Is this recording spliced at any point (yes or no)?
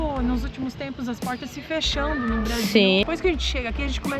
yes